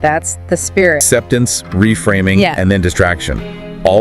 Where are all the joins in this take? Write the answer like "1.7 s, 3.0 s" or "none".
1.0 s